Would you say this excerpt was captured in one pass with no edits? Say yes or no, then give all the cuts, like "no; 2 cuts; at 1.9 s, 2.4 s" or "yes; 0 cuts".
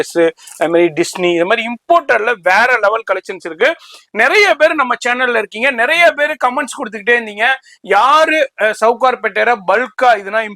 yes; 0 cuts